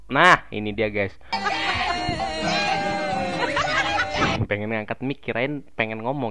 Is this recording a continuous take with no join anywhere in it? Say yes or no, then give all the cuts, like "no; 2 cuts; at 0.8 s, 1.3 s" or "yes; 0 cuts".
no; 1 cut; at 1.4 s